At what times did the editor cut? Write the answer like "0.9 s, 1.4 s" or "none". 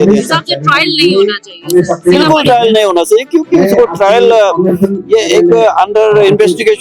none